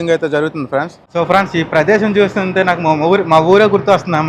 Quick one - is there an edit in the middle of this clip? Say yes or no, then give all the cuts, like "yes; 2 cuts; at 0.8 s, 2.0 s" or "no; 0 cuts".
yes; 1 cut; at 1.0 s